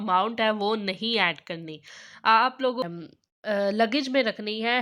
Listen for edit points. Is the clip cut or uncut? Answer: cut